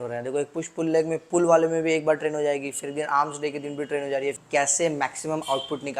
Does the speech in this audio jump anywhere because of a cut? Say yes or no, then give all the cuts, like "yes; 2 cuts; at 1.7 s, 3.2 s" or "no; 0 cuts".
yes; 1 cut; at 4.4 s